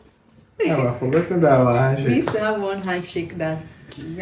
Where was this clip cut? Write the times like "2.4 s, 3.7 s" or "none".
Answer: none